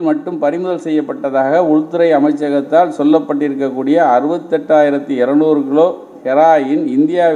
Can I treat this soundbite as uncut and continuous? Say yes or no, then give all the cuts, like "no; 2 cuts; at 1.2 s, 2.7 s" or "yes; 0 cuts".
yes; 0 cuts